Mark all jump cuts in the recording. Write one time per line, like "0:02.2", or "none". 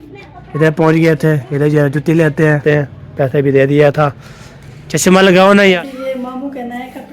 0:02.6
0:05.8